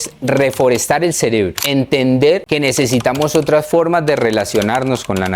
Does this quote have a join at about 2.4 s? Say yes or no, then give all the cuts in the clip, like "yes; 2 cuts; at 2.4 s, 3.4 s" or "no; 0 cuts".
yes; 2 cuts; at 1.6 s, 2.4 s